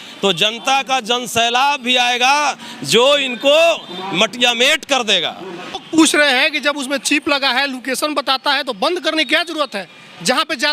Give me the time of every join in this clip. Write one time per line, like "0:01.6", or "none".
0:05.7